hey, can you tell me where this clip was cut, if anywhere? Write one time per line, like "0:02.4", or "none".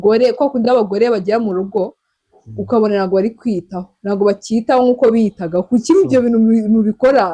none